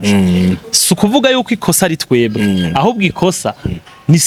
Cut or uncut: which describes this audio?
uncut